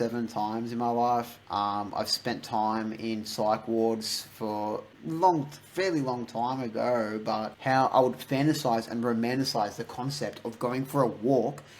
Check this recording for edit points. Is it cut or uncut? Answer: cut